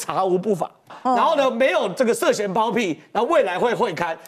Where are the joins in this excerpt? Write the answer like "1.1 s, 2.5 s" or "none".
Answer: 0.9 s